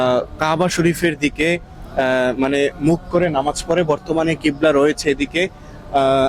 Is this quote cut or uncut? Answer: uncut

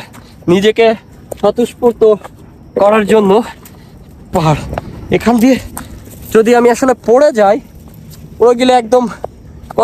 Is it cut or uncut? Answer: cut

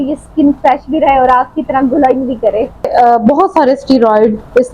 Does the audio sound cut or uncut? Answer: cut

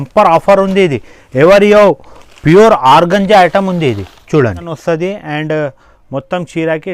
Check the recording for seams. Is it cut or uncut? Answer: cut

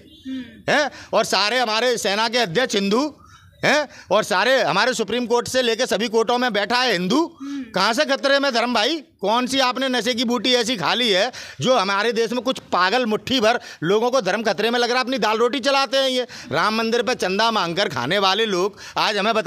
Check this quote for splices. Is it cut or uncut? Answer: uncut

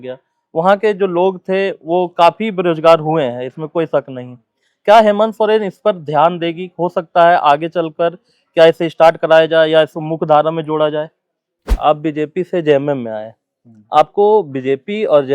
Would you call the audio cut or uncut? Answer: cut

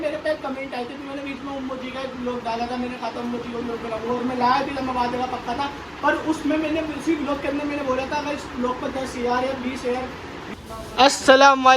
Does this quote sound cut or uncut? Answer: cut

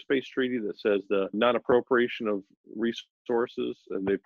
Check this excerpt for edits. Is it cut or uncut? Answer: cut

